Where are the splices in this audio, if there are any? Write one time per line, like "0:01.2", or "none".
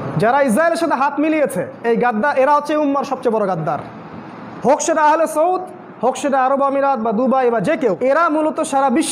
0:08.0

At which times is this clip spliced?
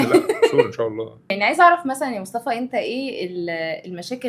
0:01.2

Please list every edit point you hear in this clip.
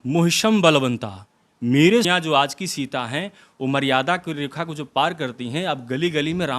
0:02.1

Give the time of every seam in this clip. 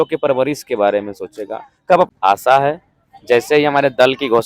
0:02.1

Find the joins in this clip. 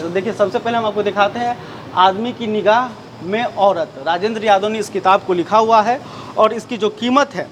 none

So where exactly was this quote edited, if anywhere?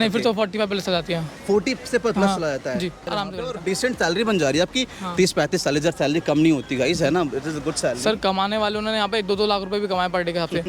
0:03.1

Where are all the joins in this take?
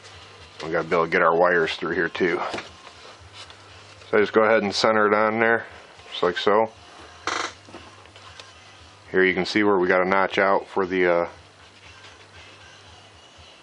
0:07.5

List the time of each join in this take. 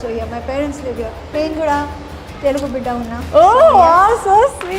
0:01.3

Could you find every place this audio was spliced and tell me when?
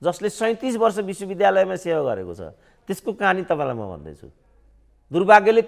none

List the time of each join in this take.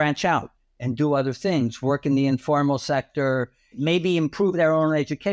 0:03.7

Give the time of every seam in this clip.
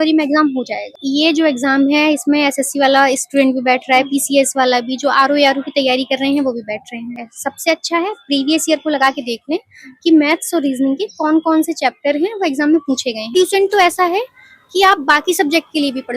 0:00.9
0:07.2
0:13.4

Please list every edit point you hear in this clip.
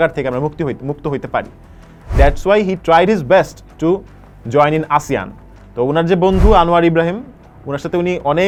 none

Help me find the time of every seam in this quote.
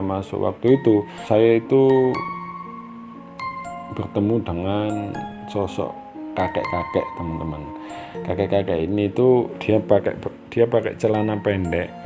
0:01.1

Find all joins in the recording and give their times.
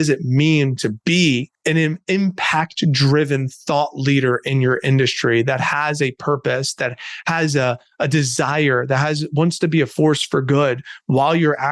0:01.5

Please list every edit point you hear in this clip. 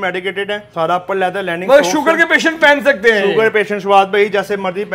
none

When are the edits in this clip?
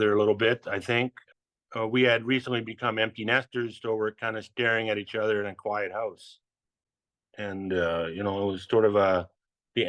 0:01.2

